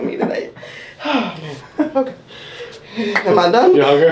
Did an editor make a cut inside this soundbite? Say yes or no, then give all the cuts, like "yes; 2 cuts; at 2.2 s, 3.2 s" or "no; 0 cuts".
no; 0 cuts